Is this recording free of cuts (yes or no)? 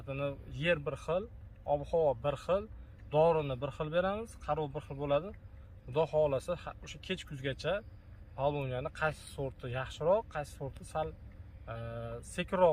yes